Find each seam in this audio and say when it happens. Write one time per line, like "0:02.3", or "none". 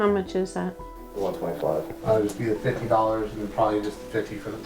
0:02.0